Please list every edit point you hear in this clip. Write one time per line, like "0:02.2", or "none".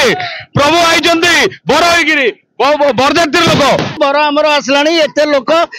0:04.0